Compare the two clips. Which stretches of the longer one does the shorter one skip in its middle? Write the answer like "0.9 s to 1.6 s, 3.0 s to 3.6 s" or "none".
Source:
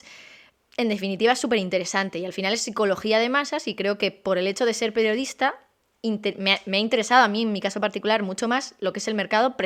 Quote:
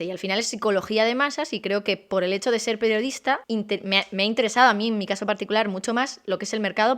5.6 s to 6.0 s